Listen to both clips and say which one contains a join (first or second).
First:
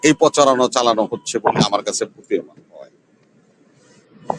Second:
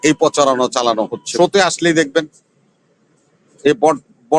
second